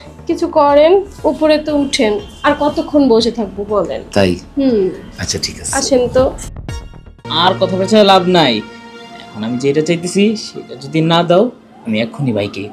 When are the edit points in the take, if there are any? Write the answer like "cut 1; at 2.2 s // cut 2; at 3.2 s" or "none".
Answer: cut 1; at 7.2 s